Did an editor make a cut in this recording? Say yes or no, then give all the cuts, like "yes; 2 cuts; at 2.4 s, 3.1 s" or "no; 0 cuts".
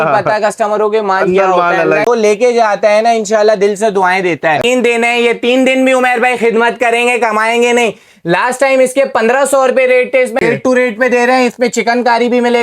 yes; 3 cuts; at 2.1 s, 4.6 s, 10.4 s